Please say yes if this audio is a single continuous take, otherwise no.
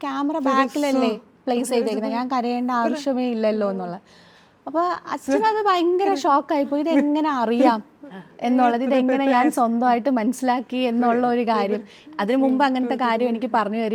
yes